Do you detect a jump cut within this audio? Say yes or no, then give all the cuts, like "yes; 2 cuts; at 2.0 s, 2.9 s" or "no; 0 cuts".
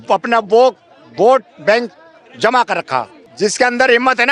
yes; 1 cut; at 3.2 s